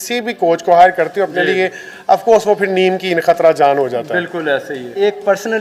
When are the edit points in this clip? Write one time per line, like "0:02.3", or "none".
none